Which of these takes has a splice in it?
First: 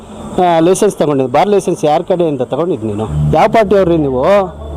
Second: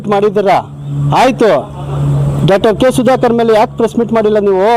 first; 1 cut; at 3.1 s

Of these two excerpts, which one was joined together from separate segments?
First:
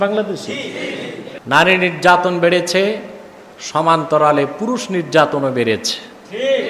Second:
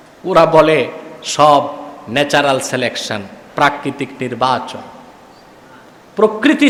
first; 1 cut; at 1.3 s

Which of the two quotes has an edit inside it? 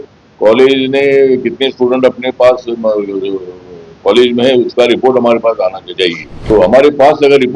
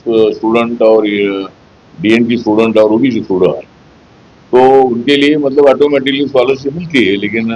first; 1 cut; at 6.3 s

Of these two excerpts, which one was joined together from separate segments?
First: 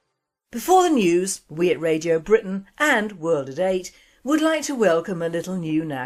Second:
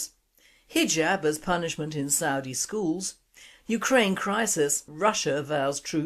second; 1 cut; at 3.8 s

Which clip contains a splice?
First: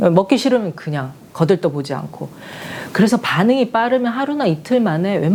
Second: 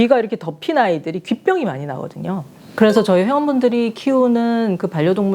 second; 1 cut; at 2.6 s

